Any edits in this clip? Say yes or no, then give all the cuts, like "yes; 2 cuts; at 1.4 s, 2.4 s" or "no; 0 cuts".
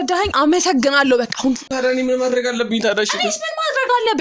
yes; 1 cut; at 1.7 s